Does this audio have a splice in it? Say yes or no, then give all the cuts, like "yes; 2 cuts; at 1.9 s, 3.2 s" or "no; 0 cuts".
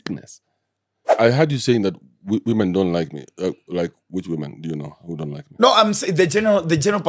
yes; 1 cut; at 1.0 s